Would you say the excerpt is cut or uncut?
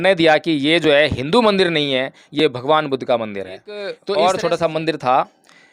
cut